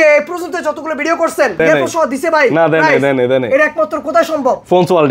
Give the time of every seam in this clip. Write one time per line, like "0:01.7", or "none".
0:01.6

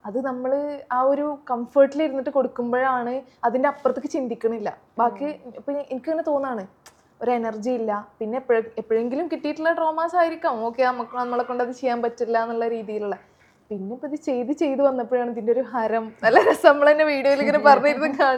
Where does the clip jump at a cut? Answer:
none

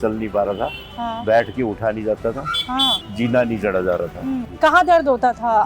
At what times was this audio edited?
0:03.0
0:04.5

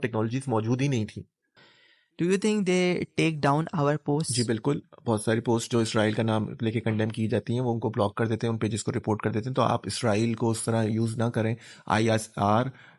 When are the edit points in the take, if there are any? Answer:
0:01.6

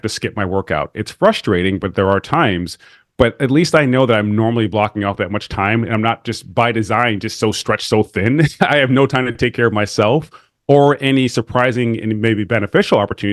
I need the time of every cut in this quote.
0:08.5

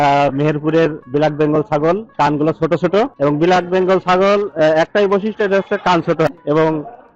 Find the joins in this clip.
0:01.0
0:02.1
0:03.1
0:06.3

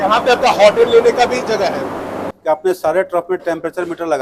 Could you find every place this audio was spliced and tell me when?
0:02.3

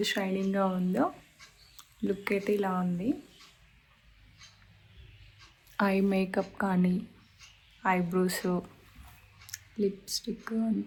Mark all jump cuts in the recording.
none

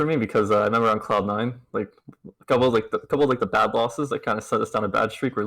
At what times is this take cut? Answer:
none

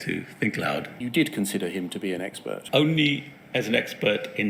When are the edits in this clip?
0:01.0
0:02.6

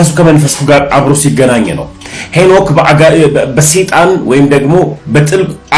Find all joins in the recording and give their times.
none

